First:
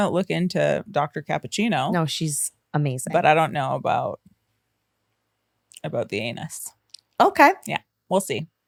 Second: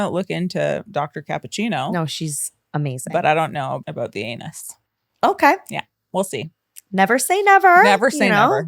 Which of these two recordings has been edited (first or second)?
second